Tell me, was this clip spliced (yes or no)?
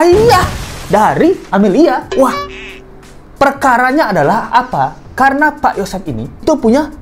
no